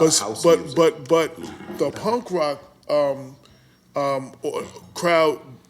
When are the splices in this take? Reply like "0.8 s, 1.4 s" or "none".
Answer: 2.0 s